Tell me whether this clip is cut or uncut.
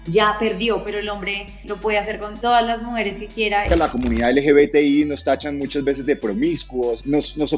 cut